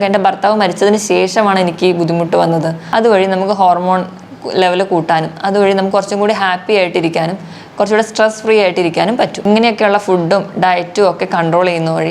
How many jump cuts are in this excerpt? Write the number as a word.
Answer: one